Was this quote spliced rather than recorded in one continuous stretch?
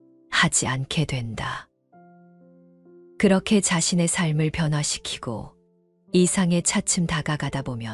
no; 0 cuts

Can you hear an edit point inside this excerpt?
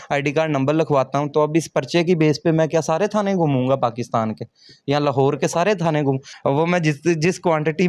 yes; 1 cut; at 6.3 s

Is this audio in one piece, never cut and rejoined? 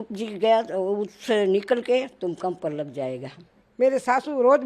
no; 1 cut; at 3.6 s

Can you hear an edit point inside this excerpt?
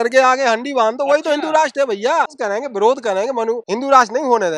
yes; 2 cuts; at 2.3 s, 3.6 s

